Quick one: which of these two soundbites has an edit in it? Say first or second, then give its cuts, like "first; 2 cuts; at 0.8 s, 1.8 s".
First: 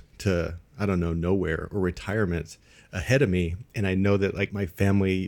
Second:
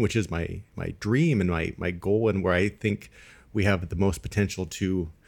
first; 2 cuts; at 3.7 s, 4.5 s